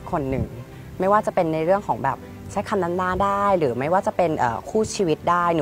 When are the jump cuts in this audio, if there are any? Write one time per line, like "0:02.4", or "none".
none